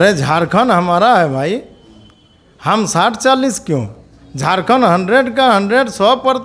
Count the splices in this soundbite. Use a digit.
0